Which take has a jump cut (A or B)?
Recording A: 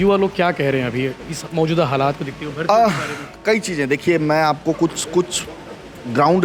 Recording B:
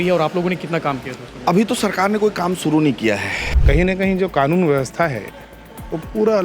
B